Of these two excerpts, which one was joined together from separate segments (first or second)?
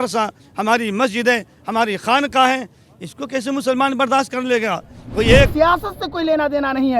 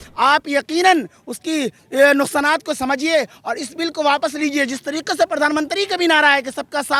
first